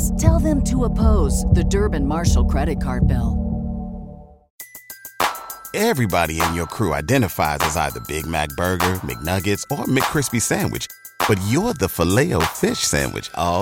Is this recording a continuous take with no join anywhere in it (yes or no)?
no